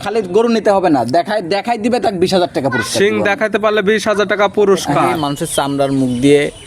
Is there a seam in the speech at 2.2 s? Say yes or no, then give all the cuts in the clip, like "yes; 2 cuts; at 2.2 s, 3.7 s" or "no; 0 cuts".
no; 1 cut; at 5.3 s